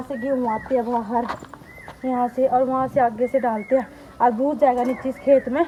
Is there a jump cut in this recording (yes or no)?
no